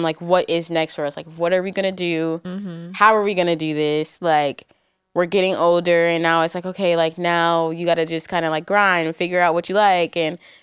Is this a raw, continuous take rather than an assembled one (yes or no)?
yes